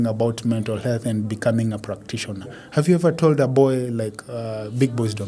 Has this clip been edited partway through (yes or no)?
no